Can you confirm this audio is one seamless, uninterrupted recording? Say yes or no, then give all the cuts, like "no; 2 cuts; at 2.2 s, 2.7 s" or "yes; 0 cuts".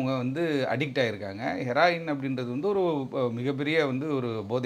yes; 0 cuts